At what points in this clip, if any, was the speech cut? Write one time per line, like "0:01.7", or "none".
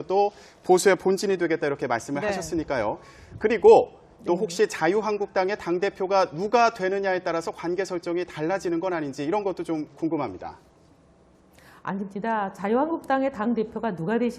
none